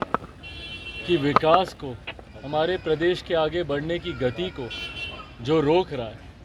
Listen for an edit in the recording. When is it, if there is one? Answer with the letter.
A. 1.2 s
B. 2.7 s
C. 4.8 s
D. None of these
D